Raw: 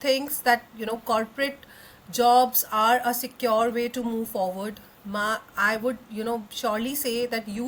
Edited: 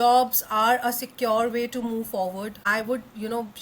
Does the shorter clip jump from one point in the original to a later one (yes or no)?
yes